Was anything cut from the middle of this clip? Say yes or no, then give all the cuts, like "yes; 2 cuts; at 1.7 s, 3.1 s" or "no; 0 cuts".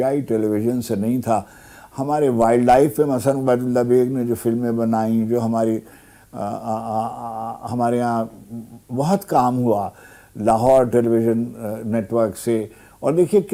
no; 0 cuts